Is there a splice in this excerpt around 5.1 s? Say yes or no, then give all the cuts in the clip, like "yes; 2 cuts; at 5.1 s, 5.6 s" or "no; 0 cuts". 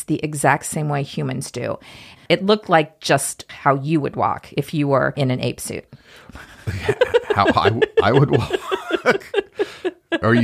yes; 3 cuts; at 2.2 s, 3.4 s, 5.1 s